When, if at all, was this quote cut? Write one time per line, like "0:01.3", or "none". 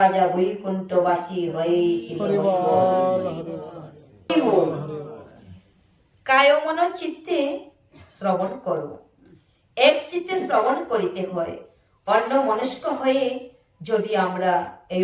0:04.3